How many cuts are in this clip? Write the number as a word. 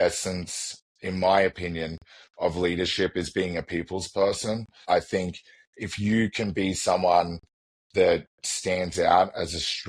one